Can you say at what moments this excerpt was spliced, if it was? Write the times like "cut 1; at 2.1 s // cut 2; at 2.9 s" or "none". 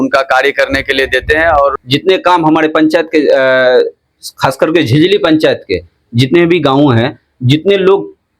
cut 1; at 1.8 s